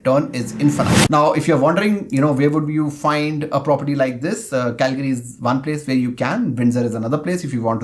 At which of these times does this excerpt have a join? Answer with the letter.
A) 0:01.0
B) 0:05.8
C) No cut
A